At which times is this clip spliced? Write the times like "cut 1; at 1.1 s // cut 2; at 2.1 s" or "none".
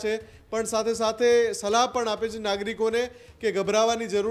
none